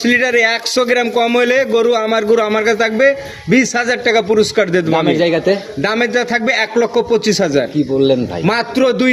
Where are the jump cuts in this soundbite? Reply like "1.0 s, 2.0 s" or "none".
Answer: none